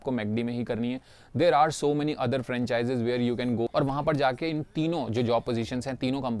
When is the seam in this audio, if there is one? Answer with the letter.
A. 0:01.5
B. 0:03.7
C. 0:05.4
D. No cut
B